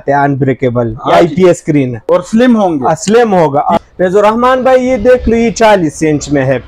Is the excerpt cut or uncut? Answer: cut